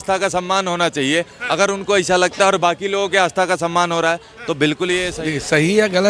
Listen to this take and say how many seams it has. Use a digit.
1